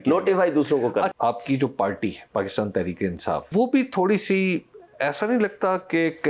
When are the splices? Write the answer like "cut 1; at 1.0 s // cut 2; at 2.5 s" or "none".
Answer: cut 1; at 1.1 s // cut 2; at 2.2 s // cut 3; at 3.5 s